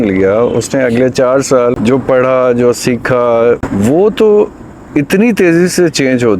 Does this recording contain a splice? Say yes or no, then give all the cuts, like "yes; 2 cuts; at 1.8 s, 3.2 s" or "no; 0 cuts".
yes; 2 cuts; at 1.8 s, 3.7 s